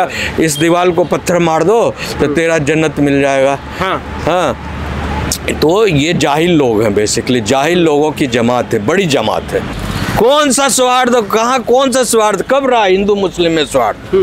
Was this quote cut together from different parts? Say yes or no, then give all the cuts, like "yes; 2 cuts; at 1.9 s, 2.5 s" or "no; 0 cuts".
yes; 1 cut; at 9.7 s